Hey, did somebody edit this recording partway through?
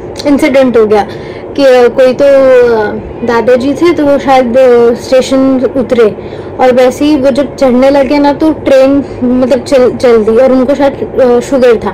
no; 0 cuts

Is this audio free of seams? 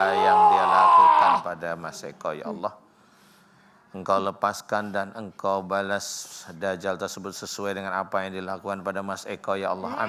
yes; 0 cuts

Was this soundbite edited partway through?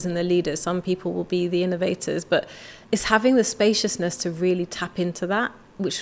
no; 0 cuts

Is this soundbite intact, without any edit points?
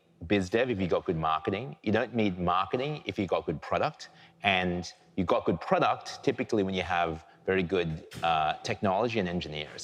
yes; 0 cuts

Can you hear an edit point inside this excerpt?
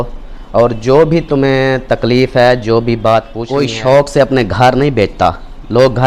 yes; 1 cut; at 3.4 s

